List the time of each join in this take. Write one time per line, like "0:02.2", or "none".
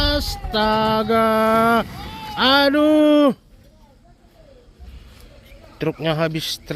0:04.8